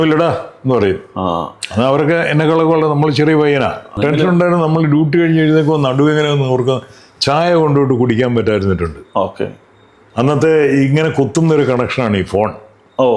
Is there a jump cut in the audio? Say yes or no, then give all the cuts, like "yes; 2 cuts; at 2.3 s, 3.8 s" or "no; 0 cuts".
yes; 1 cut; at 3.9 s